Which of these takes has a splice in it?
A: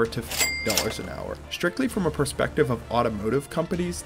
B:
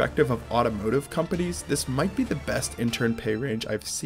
A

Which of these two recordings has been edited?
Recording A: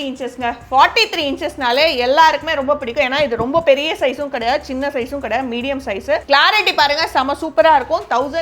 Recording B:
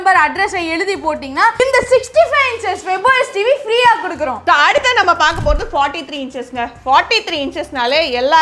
B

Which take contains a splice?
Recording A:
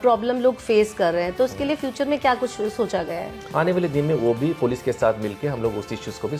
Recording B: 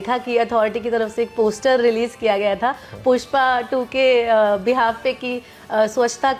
A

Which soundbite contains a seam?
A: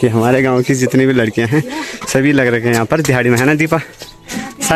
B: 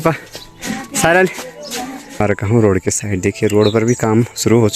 B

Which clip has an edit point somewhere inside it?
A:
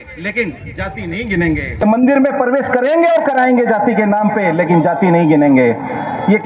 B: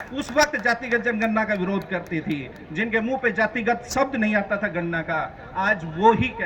A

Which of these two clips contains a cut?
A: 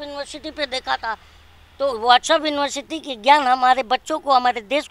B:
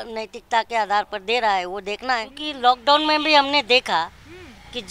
B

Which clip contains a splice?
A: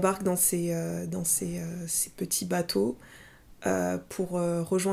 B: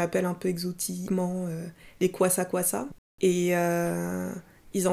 B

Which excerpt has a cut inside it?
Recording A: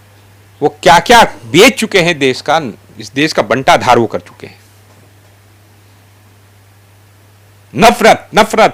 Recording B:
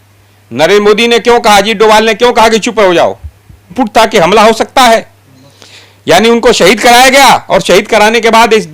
B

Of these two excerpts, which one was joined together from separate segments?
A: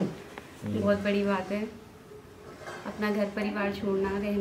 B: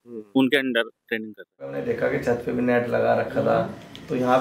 B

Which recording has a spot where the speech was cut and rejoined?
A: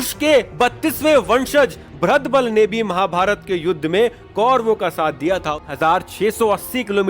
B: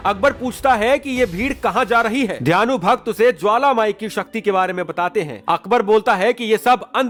A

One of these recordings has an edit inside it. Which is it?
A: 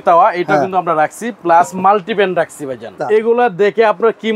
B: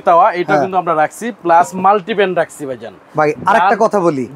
A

